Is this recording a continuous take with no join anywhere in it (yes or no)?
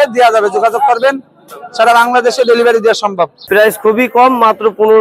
no